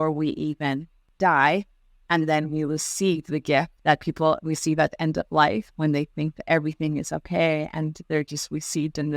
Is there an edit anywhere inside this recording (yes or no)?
yes